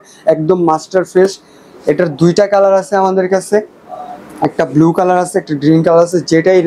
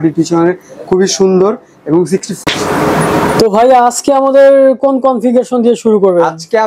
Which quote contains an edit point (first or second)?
second